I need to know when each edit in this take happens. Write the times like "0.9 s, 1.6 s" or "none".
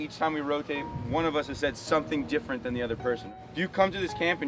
3.3 s